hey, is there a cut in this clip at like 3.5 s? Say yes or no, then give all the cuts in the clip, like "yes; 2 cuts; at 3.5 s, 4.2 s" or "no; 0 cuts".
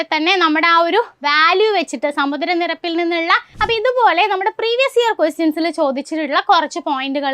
yes; 1 cut; at 3.5 s